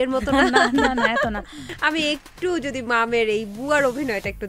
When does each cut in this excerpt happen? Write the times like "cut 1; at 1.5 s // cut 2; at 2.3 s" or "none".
cut 1; at 1.7 s